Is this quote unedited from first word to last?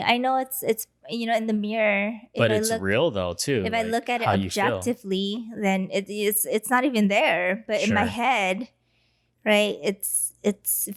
yes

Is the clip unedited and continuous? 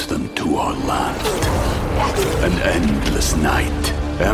yes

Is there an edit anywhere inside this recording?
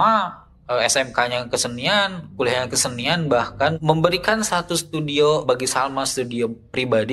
yes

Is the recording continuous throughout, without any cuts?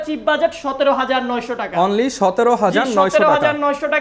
yes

